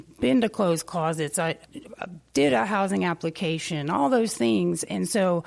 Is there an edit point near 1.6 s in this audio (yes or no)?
no